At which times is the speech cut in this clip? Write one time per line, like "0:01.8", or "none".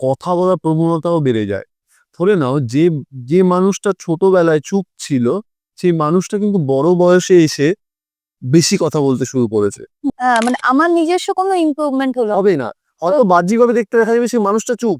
0:10.1